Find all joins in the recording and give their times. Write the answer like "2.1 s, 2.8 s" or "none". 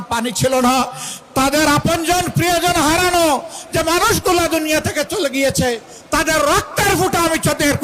none